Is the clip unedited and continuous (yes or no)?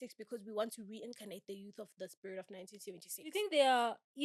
no